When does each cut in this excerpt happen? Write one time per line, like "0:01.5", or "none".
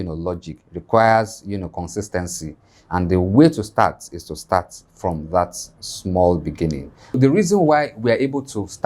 0:07.2